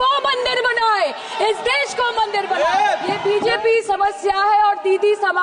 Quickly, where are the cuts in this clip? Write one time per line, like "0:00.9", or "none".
0:03.2